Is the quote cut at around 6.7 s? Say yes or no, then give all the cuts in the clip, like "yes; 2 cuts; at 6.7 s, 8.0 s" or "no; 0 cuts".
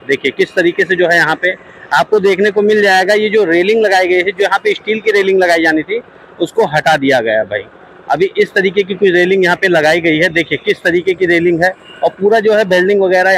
no; 0 cuts